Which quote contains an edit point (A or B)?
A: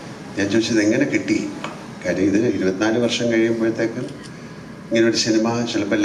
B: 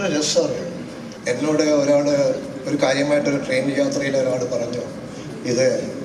B